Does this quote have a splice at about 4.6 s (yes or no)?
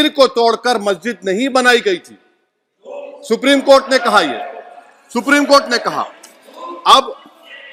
no